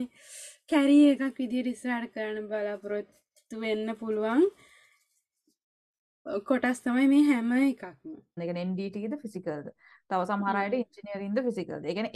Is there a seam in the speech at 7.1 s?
no; 1 cut; at 8.4 s

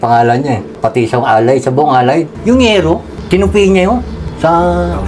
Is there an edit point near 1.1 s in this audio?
no; 2 cuts; at 2.3 s, 4.2 s

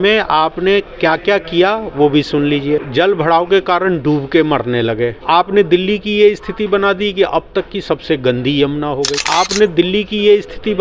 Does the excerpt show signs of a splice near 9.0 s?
no; 1 cut; at 2.9 s

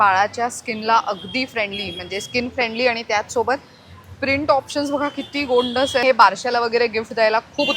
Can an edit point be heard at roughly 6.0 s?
yes; 1 cut; at 6.0 s

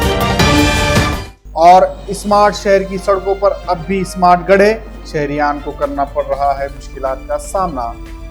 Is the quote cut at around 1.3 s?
yes; 1 cut; at 1.3 s

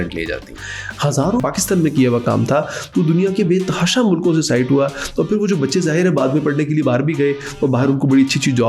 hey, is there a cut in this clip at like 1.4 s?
yes; 1 cut; at 1.4 s

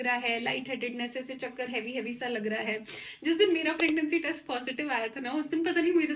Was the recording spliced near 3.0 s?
no; 0 cuts

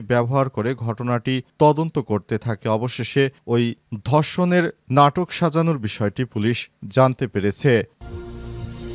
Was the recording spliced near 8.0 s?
yes; 1 cut; at 8.0 s

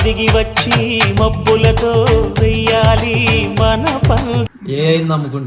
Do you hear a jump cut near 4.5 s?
yes; 1 cut; at 4.5 s

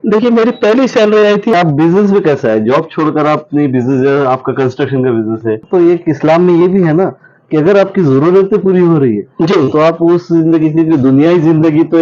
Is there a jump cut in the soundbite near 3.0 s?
no; 2 cuts; at 1.5 s, 5.6 s

